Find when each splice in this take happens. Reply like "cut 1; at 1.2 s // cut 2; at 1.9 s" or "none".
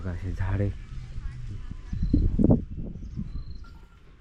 none